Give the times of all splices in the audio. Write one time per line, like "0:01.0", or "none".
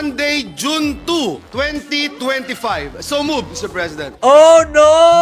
none